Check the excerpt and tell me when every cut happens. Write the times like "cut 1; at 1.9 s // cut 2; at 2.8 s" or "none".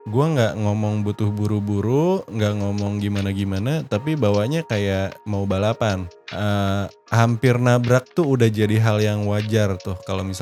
none